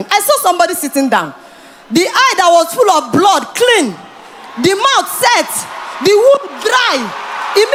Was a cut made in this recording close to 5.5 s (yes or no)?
no